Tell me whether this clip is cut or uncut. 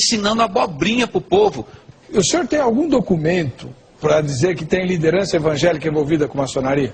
uncut